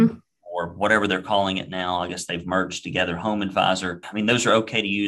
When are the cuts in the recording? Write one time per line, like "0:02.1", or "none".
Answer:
0:04.0